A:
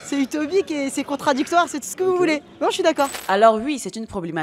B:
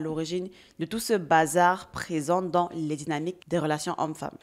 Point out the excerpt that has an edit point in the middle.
A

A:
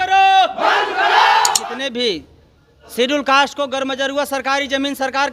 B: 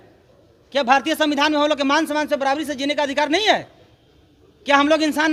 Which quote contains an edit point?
A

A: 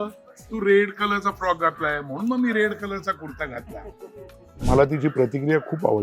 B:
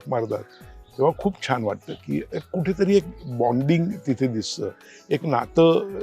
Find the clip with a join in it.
A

